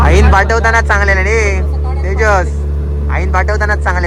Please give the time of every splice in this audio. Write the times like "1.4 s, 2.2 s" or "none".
none